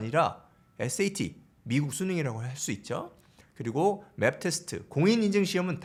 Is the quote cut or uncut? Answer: uncut